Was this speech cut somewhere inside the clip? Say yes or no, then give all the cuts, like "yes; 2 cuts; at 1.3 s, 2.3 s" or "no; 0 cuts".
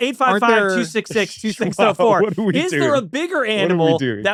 no; 0 cuts